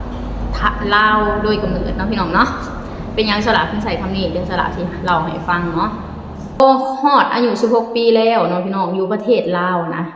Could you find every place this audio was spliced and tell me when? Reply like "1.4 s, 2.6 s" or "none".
6.6 s